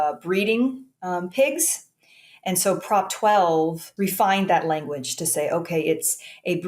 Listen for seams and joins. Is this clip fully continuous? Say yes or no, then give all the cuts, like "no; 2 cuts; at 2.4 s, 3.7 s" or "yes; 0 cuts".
no; 1 cut; at 3.8 s